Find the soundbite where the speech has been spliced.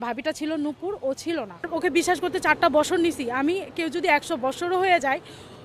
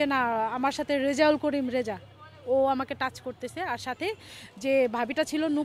first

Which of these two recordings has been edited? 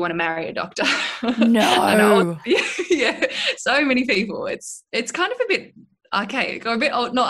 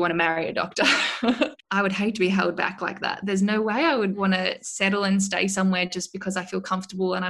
second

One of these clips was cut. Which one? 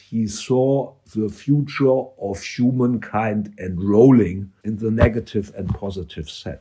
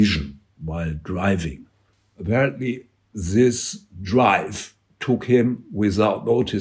first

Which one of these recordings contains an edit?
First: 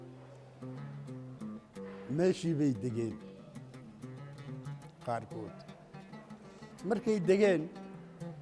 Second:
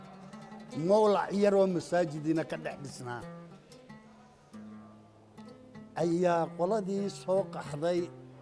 first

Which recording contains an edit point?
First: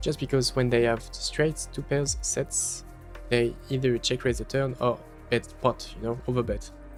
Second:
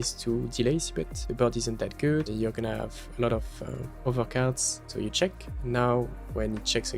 second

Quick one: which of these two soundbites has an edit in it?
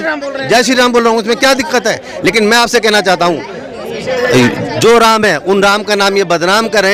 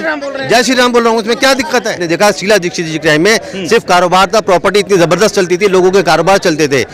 second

